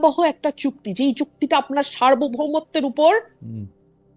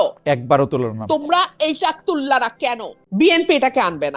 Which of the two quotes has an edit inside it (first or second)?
second